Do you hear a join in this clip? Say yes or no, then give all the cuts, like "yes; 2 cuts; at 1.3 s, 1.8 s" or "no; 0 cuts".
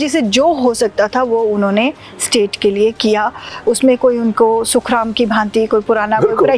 no; 0 cuts